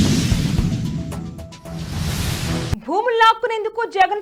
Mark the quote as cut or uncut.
uncut